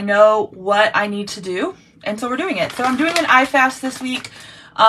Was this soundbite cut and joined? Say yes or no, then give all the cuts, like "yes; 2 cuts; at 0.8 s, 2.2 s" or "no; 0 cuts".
no; 0 cuts